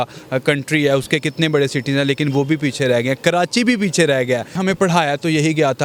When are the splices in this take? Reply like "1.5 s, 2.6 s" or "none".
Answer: 4.6 s